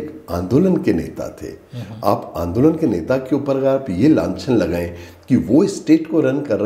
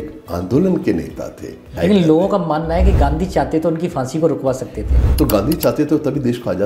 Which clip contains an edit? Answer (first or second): second